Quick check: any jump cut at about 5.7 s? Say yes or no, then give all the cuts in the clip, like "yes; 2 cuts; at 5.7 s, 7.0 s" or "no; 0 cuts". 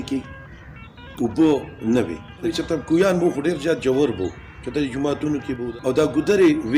yes; 2 cuts; at 2.5 s, 5.7 s